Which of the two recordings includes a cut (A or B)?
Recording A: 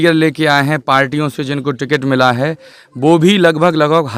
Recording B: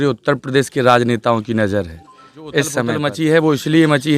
B